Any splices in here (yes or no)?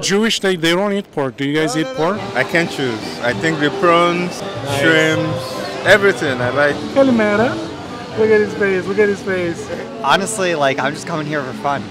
yes